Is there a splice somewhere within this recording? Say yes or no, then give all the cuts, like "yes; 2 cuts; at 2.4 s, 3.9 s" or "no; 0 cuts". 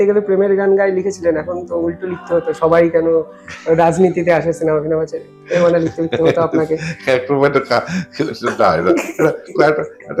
no; 0 cuts